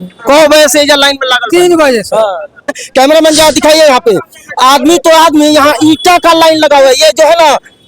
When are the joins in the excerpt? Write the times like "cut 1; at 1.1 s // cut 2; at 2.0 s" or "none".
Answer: cut 1; at 2.8 s